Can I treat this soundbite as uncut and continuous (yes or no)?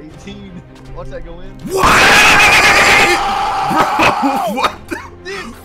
yes